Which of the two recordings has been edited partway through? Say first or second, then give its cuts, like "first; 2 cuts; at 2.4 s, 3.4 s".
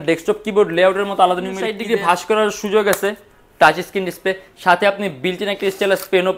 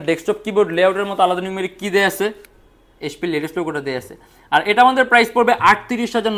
first; 1 cut; at 1.7 s